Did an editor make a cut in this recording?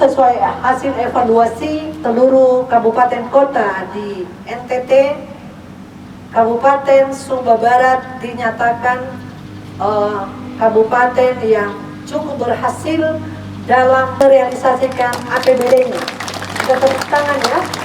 yes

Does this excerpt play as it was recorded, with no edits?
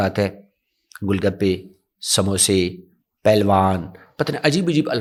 yes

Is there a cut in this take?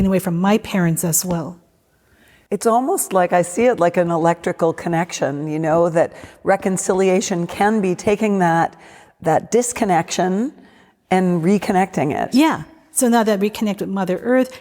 no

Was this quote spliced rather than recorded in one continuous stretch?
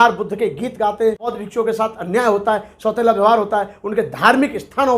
yes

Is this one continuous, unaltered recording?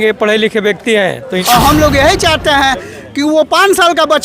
no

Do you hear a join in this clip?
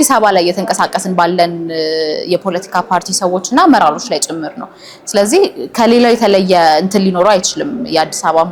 no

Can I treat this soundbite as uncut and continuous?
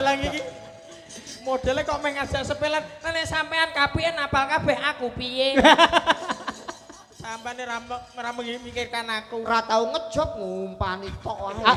yes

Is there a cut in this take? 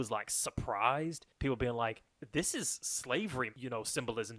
yes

